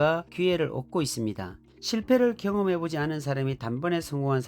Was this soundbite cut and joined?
yes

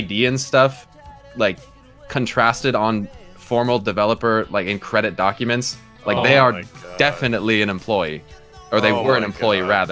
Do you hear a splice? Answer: no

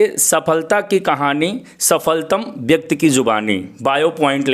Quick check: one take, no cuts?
yes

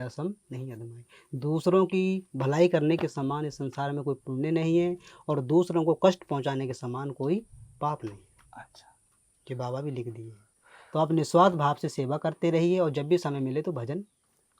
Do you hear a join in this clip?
no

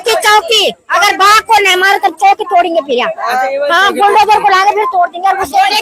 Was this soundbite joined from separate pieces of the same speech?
no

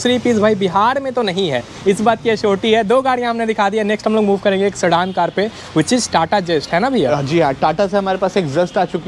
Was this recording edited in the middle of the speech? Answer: no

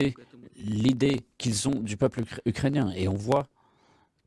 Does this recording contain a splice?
yes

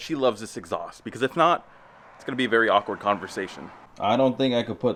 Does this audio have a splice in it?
no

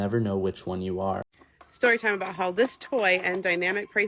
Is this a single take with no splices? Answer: no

